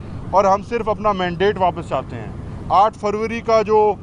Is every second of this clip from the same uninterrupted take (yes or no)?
yes